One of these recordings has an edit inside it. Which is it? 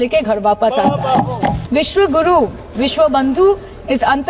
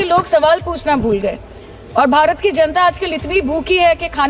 first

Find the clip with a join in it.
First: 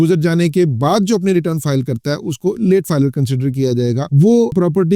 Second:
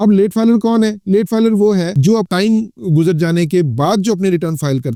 first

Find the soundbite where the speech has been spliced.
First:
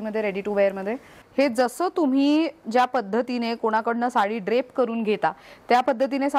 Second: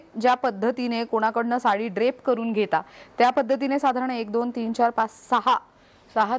first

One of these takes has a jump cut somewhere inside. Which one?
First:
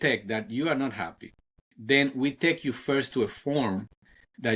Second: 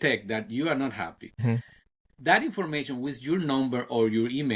second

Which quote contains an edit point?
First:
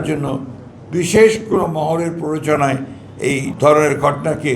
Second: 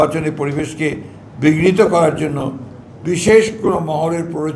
first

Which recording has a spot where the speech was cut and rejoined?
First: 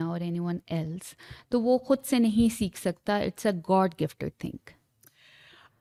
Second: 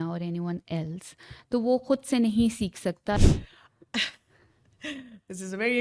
second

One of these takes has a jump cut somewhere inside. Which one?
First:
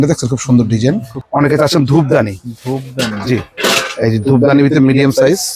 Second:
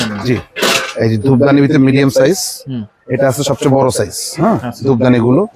first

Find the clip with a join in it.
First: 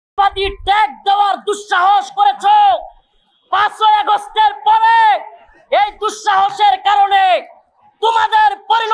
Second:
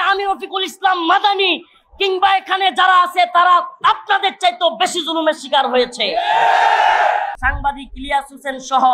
second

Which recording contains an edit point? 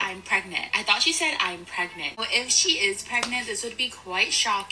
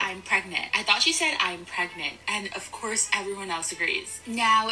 first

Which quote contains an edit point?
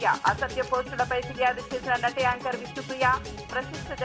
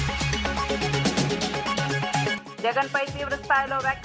second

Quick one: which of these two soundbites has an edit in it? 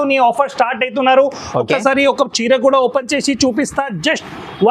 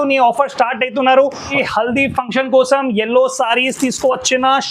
second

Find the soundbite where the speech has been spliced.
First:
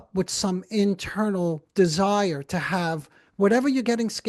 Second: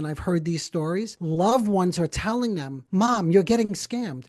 second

